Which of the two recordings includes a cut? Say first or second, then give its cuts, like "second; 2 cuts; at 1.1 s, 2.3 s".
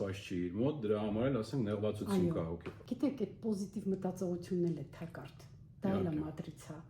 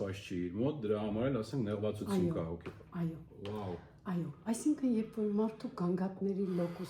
first; 1 cut; at 2.7 s